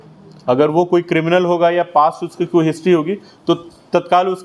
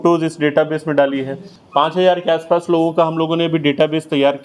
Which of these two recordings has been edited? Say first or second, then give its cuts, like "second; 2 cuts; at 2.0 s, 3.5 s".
second; 1 cut; at 1.5 s